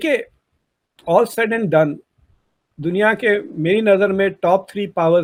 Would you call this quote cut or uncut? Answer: uncut